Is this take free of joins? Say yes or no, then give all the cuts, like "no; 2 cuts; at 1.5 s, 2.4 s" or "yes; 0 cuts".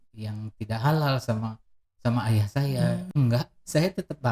no; 1 cut; at 3.1 s